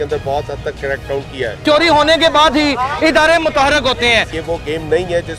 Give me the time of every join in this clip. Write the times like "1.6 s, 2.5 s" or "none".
1.6 s, 4.3 s